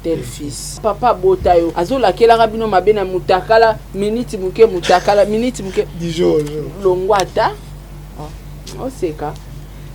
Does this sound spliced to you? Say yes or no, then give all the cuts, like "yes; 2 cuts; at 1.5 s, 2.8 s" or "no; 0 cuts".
yes; 2 cuts; at 0.8 s, 1.8 s